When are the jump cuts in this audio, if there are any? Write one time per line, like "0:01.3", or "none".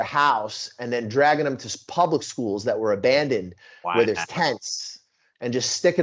none